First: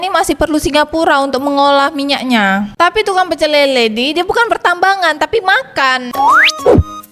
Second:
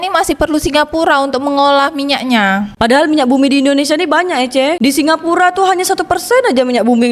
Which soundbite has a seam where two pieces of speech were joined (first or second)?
first